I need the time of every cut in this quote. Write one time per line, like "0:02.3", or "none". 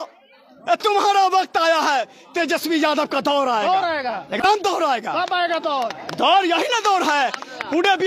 none